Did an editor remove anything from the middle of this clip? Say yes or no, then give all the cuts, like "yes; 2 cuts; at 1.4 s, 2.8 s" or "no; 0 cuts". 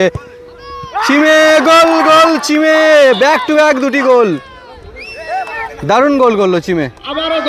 no; 0 cuts